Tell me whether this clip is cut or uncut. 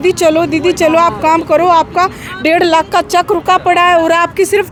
uncut